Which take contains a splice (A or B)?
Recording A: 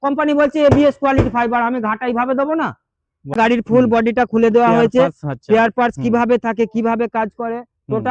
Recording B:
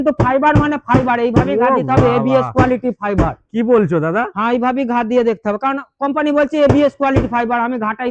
A